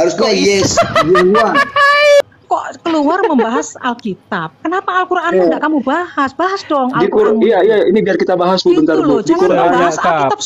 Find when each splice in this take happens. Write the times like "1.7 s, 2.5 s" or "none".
2.2 s